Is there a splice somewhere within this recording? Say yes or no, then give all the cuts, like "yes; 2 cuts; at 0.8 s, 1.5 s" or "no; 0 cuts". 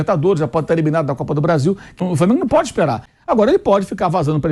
yes; 2 cuts; at 2.0 s, 3.1 s